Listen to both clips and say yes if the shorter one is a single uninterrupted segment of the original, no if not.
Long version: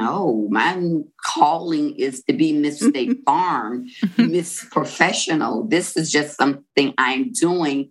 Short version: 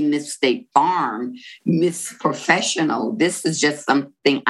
yes